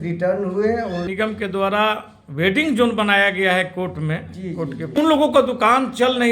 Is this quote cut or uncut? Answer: cut